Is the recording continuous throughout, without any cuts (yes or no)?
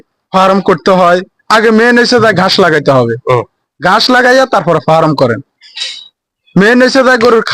yes